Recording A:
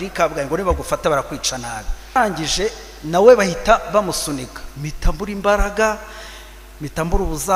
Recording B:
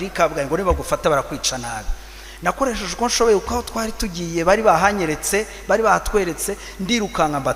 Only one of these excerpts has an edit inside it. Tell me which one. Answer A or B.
A